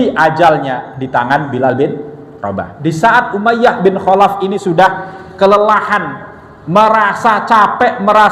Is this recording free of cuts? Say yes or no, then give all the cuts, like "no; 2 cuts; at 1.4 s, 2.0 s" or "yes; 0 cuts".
no; 1 cut; at 2.7 s